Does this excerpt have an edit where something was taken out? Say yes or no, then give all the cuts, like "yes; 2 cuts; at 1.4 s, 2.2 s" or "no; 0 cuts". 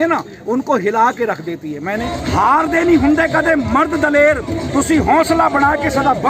yes; 1 cut; at 2.1 s